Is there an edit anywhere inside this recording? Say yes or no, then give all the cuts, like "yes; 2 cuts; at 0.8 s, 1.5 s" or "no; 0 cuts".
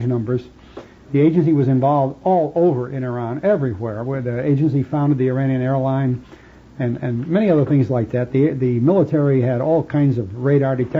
yes; 1 cut; at 4.0 s